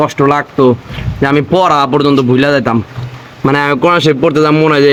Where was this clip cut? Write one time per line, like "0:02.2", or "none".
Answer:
none